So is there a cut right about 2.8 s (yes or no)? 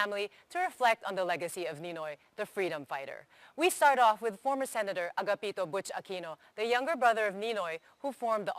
no